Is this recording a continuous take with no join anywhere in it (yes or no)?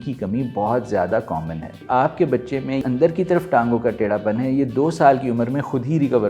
no